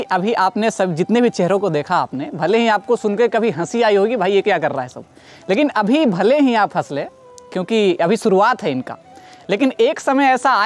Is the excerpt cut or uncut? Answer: uncut